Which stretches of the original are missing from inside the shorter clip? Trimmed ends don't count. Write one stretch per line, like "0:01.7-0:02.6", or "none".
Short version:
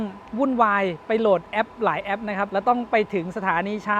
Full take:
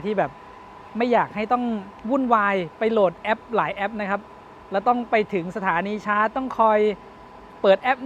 0:04.2-0:04.7

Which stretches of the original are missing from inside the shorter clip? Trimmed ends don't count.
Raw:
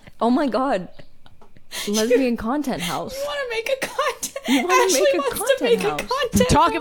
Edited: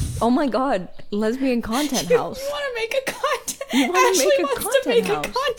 0:01.0-0:01.7

